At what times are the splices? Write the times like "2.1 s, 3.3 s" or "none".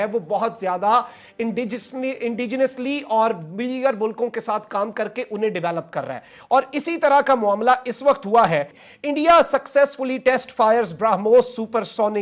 8.8 s